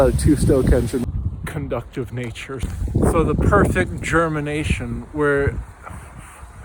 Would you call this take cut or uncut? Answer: cut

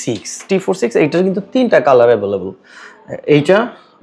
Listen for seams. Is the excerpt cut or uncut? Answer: uncut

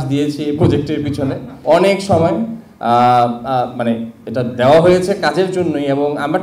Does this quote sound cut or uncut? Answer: uncut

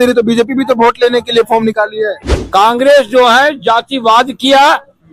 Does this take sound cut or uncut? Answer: cut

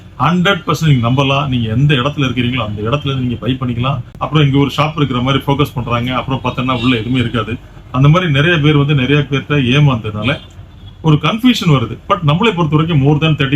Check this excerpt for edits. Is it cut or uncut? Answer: cut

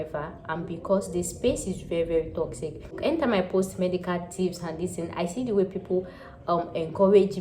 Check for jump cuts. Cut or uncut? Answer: cut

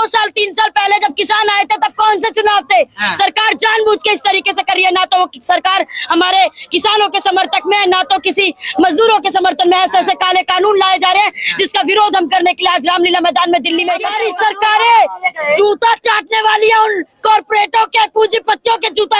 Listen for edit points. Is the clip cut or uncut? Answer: cut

